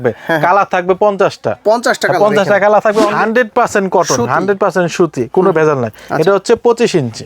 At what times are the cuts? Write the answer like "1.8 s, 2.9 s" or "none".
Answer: 3.1 s